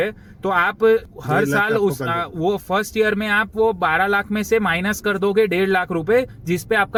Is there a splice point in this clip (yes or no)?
no